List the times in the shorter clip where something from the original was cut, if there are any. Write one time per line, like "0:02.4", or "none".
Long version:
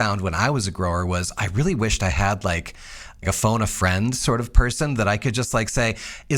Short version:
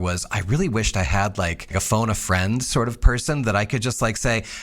0:01.6